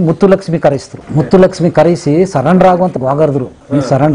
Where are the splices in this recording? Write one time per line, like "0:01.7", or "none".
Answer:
0:01.0
0:02.9

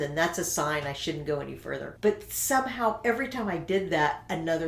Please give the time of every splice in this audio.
0:01.9

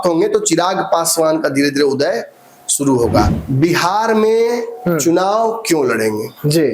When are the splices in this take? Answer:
0:03.3

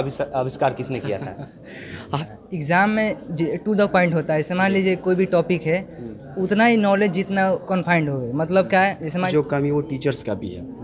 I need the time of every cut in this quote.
0:02.2
0:09.3

